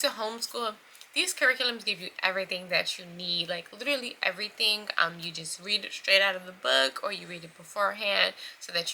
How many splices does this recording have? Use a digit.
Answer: 0